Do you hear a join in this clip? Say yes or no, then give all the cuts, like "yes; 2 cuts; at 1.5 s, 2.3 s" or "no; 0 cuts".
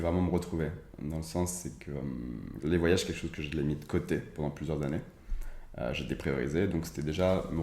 yes; 1 cut; at 2.4 s